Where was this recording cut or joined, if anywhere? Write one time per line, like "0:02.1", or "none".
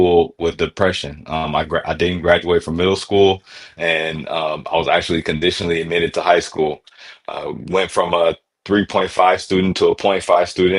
none